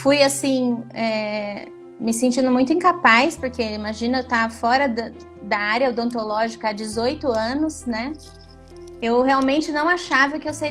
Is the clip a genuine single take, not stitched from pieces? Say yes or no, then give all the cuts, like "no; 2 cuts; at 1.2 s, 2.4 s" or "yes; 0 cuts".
yes; 0 cuts